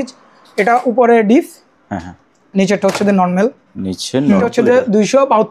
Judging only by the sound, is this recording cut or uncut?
cut